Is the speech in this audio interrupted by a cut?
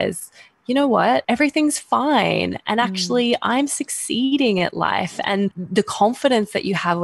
yes; 2 cuts; at 1.2 s, 5.6 s

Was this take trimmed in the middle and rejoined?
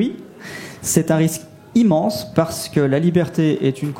no; 0 cuts

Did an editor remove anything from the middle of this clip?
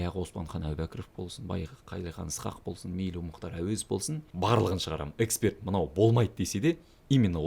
yes; 1 cut; at 4.2 s

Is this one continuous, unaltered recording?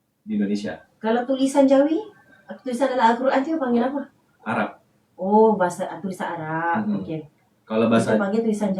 yes; 0 cuts

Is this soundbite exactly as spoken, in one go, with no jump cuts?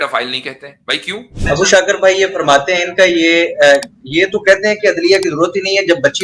no; 1 cut; at 1.4 s

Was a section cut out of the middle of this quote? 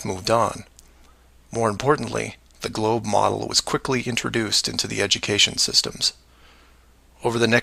yes; 1 cut; at 2.6 s

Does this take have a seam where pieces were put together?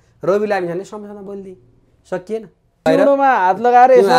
yes; 1 cut; at 2.9 s

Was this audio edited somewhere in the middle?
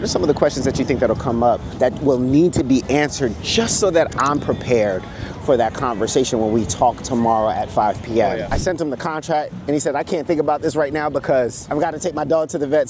yes; 3 cuts; at 1.7 s, 8.5 s, 11.6 s

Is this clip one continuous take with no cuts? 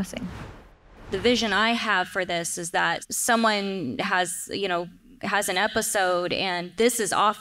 no; 2 cuts; at 0.9 s, 3.0 s

